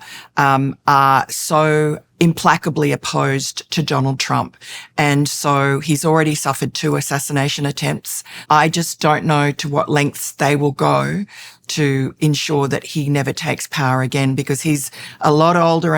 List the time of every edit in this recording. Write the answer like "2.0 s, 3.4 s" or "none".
2.0 s, 8.4 s